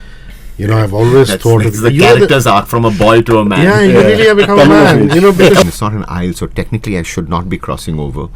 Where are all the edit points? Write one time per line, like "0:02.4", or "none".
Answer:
0:05.6